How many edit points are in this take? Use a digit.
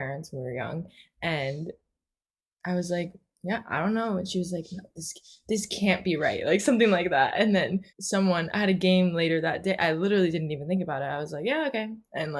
1